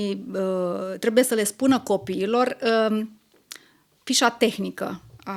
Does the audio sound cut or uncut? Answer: uncut